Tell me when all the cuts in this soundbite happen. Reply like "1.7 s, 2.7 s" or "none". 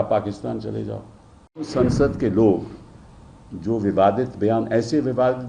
1.7 s